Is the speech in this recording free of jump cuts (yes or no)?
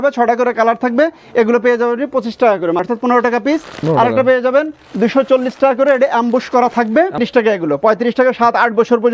no